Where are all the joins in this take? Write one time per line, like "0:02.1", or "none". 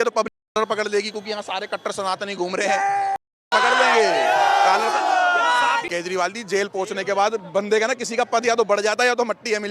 0:05.9

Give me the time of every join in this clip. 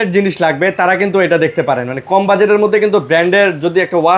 none

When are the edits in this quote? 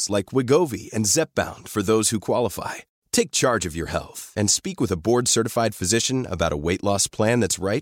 none

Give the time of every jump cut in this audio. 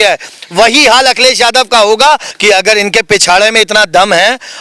0:02.3

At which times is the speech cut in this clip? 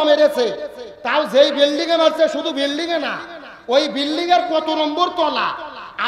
none

